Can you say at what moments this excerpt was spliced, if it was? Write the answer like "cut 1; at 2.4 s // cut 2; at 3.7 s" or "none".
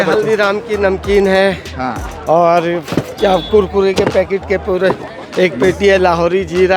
none